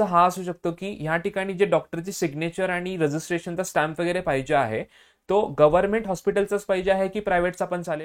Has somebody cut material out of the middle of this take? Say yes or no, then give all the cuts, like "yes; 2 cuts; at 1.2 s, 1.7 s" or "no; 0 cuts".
no; 0 cuts